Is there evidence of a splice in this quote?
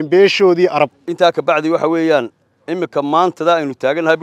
yes; 1 cut; at 1.0 s

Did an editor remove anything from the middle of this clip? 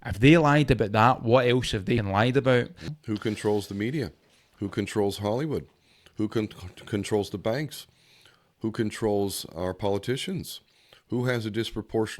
yes; 2 cuts; at 2.1 s, 3.0 s

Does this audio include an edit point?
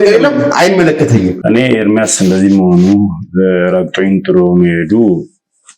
yes; 1 cut; at 1.4 s

